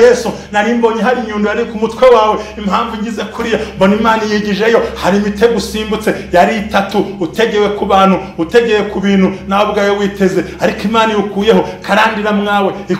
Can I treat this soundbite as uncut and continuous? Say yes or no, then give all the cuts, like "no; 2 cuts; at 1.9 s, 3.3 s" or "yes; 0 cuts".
yes; 0 cuts